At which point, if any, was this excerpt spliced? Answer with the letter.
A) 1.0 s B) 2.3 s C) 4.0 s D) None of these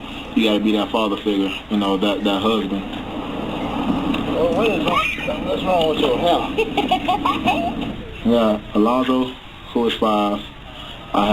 B